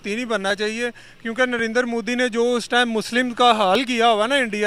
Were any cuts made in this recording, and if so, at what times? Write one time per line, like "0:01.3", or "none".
none